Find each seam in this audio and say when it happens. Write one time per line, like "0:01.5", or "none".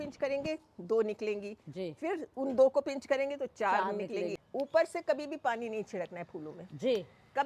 0:04.4